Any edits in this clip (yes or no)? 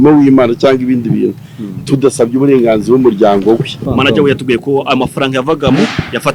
yes